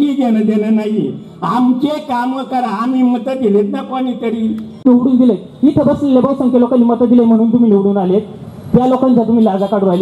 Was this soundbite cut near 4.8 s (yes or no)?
yes